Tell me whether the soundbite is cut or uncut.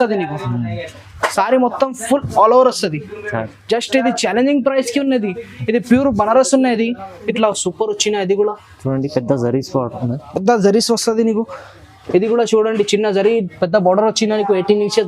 cut